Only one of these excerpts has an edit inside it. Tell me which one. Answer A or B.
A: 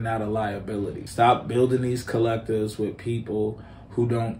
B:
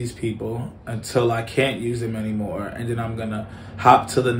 A